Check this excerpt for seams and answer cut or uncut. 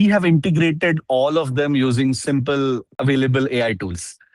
cut